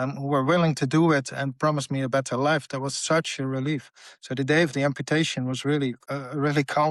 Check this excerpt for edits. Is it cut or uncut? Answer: uncut